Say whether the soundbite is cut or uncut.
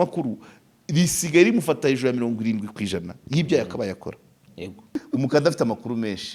cut